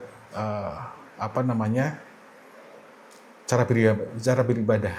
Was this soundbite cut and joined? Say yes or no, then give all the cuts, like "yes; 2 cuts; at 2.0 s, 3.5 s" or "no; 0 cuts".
no; 0 cuts